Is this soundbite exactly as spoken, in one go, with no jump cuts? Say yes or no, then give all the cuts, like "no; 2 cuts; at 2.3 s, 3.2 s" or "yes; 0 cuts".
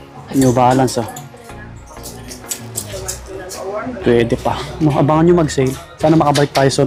yes; 0 cuts